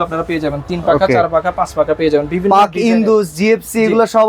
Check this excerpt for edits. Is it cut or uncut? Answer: uncut